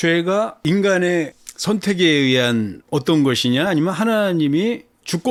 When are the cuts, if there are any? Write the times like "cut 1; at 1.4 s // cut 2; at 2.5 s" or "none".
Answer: none